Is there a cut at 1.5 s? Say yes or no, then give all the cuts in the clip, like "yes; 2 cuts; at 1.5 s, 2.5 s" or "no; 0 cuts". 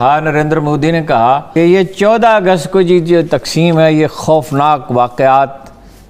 yes; 1 cut; at 1.5 s